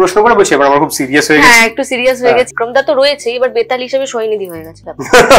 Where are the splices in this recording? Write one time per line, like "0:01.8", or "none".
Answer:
0:02.5